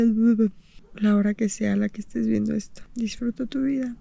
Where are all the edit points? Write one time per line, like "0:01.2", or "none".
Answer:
0:02.8

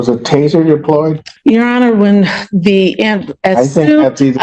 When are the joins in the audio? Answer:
0:01.2

